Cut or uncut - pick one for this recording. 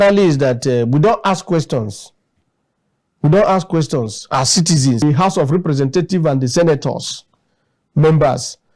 cut